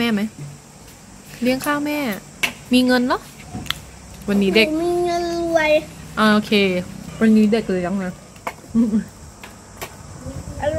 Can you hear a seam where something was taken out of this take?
no; 0 cuts

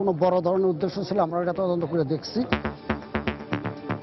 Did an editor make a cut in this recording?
yes; 1 cut; at 2.8 s

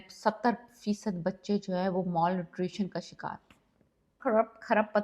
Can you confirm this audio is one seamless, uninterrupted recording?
no; 1 cut; at 4.1 s

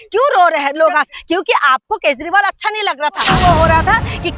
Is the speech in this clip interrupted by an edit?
yes; 1 cut; at 3.3 s

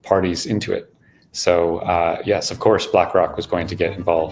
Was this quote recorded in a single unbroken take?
yes; 0 cuts

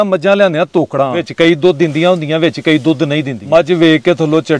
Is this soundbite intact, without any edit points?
no; 2 cuts; at 1.3 s, 3.4 s

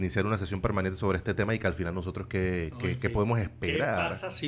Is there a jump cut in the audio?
no; 0 cuts

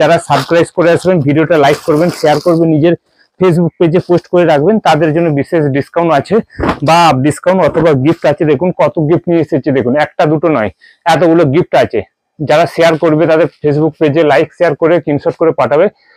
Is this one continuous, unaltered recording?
yes; 0 cuts

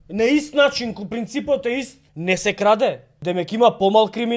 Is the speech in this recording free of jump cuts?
no; 2 cuts; at 2.0 s, 3.1 s

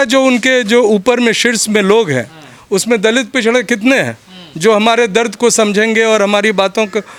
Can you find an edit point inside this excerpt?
no; 0 cuts

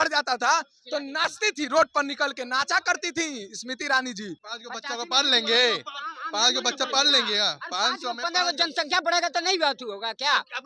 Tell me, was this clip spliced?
yes; 1 cut; at 4.5 s

